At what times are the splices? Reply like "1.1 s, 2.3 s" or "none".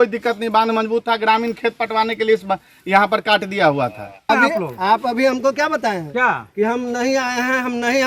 4.3 s

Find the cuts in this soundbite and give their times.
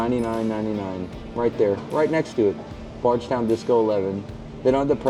none

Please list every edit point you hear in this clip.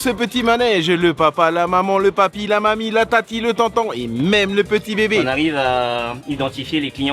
5.2 s

